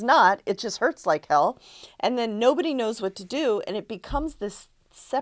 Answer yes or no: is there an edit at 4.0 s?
no